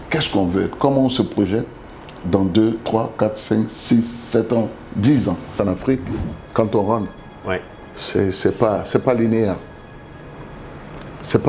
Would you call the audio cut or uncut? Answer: cut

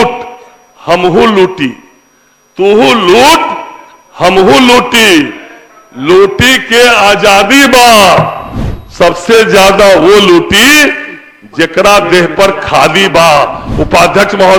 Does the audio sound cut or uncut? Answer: uncut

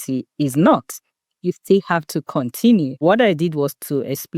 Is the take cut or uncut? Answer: cut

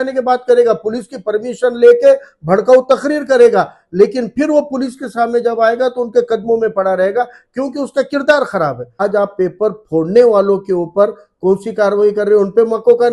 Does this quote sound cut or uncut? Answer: cut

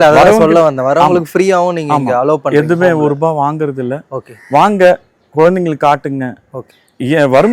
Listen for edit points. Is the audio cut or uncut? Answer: uncut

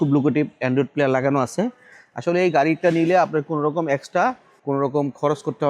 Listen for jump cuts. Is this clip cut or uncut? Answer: cut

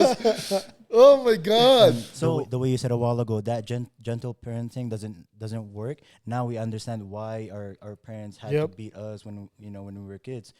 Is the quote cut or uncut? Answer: cut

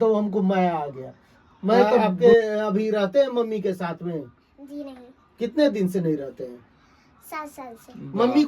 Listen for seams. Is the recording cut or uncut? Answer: cut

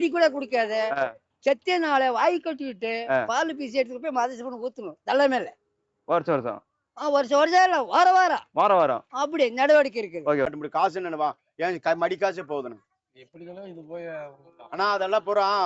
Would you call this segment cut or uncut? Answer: cut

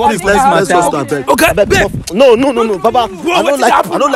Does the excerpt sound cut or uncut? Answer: uncut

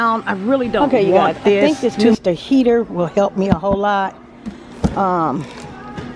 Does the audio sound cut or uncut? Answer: cut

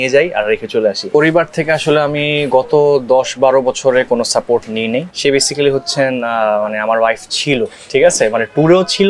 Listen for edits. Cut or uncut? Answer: cut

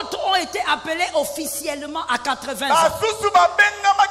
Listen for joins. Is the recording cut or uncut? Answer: uncut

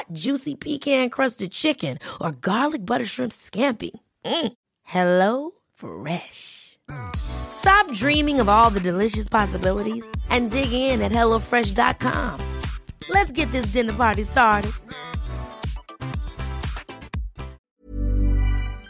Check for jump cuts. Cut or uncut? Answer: cut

